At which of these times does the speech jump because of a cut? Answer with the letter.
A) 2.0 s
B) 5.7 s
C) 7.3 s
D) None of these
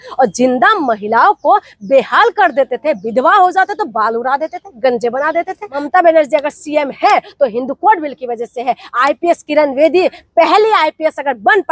B